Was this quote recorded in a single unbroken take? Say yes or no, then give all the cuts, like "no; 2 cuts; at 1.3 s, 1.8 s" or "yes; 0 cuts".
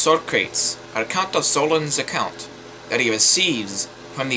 yes; 0 cuts